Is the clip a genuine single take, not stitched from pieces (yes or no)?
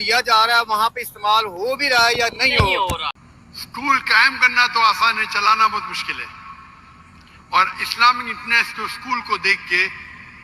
no